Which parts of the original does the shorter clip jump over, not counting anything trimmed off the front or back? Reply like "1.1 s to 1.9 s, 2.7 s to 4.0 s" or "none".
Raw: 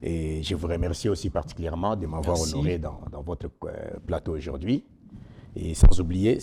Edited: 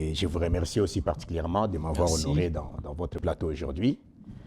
3.4 s to 4.0 s